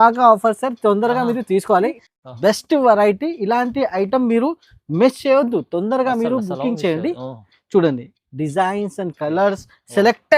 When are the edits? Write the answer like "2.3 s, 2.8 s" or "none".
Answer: 2.0 s